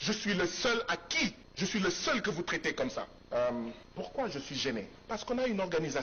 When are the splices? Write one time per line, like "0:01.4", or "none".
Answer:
0:01.4
0:03.2
0:03.8
0:05.0